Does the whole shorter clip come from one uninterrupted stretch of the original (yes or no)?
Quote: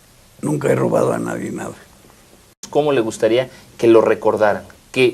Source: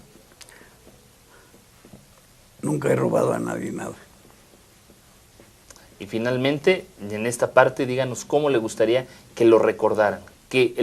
no